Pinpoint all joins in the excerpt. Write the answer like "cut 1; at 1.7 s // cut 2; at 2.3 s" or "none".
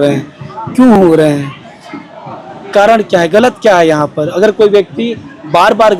none